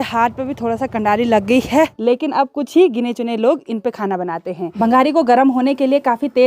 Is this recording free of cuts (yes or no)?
no